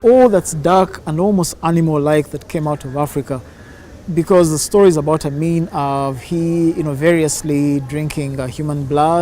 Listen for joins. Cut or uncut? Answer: uncut